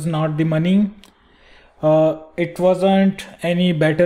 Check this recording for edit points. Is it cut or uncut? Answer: uncut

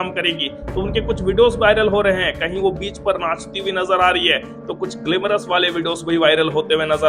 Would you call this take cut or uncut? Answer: uncut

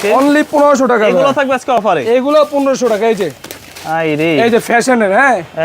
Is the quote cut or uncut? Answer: uncut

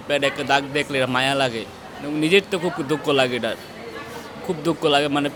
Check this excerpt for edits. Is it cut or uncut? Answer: uncut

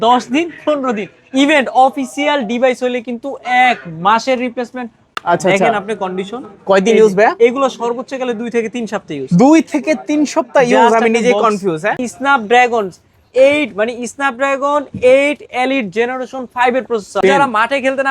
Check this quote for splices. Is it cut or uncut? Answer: cut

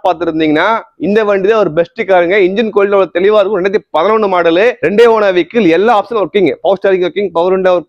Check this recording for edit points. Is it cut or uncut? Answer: uncut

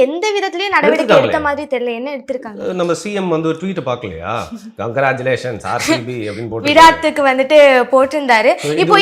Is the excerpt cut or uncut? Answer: uncut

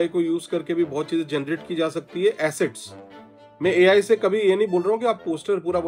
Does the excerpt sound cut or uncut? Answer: uncut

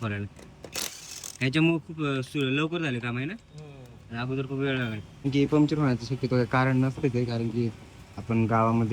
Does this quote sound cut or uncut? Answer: cut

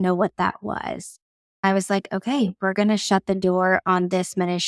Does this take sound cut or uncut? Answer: cut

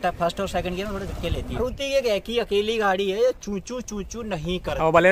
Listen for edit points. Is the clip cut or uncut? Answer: cut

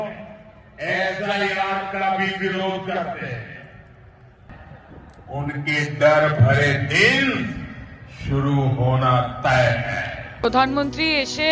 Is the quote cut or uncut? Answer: cut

